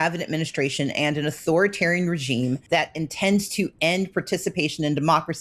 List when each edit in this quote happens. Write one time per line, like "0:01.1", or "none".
0:02.6